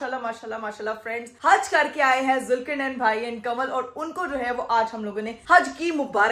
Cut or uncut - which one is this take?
uncut